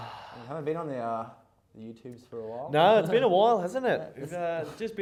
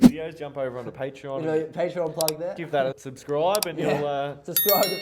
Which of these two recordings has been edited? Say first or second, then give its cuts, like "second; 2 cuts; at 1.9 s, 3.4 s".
second; 1 cut; at 3.1 s